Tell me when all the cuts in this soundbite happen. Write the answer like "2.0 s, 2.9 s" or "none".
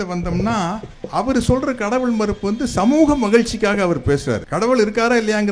0.9 s, 4.5 s